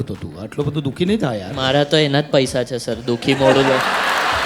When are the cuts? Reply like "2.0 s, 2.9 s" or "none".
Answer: 1.5 s